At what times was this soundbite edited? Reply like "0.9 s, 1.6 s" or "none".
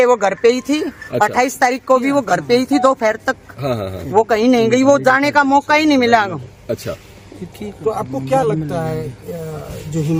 none